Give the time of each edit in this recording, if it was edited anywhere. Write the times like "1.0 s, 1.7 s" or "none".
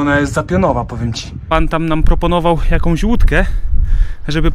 1.3 s